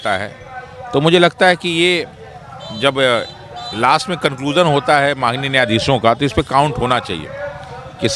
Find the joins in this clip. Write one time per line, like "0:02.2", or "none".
none